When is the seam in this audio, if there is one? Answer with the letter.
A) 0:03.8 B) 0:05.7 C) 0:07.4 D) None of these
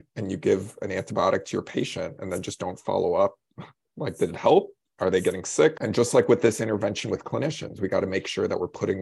B